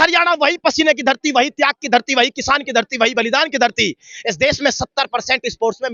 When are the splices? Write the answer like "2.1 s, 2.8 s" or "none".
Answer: none